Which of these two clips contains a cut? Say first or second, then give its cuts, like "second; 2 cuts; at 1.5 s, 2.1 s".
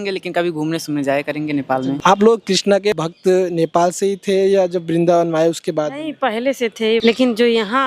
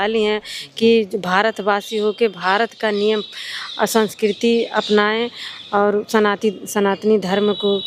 first; 3 cuts; at 2.0 s, 3.0 s, 7.0 s